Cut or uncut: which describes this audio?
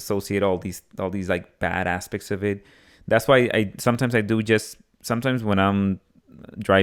uncut